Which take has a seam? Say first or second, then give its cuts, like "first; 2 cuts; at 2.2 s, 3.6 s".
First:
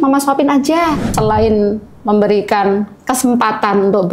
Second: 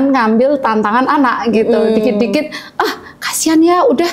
first; 1 cut; at 1.0 s